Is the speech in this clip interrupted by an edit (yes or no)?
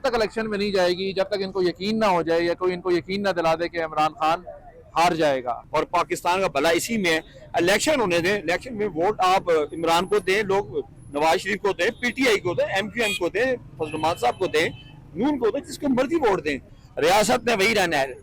yes